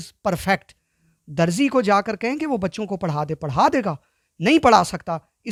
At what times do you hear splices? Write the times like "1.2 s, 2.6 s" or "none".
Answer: none

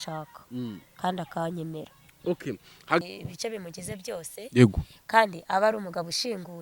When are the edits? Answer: 3.0 s

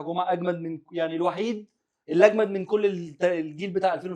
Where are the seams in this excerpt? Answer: none

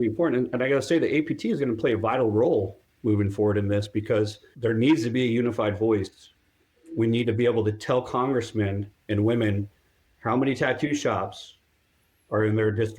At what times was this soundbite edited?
4.4 s

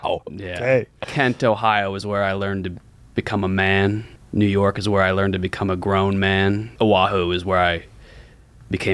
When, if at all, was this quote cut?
4.1 s, 6.7 s

